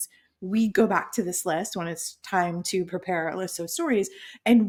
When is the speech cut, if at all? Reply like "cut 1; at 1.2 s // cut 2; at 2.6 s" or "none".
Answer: none